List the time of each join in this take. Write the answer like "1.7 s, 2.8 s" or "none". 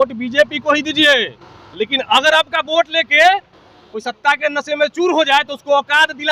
none